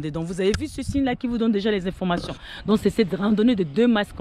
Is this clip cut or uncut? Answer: uncut